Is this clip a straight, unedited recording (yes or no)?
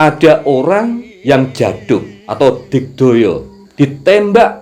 no